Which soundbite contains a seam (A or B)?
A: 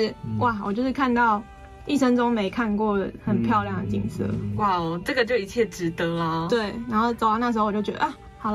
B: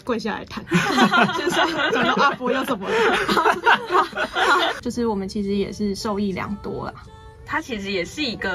B